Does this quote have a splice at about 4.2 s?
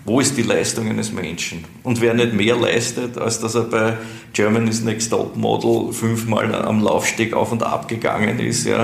no; 0 cuts

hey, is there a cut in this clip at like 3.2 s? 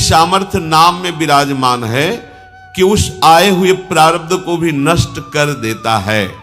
no; 0 cuts

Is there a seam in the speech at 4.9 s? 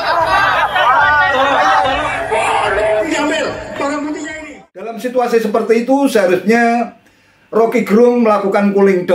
yes; 1 cut; at 4.9 s

